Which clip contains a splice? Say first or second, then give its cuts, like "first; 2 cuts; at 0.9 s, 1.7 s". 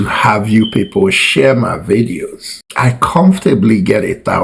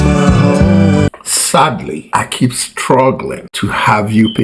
second; 1 cut; at 1.1 s